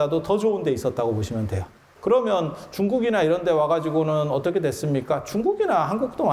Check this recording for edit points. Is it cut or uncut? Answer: cut